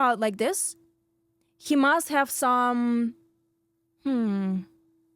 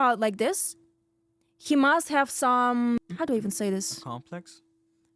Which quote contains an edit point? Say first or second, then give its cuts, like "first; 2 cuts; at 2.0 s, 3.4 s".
second; 1 cut; at 3.0 s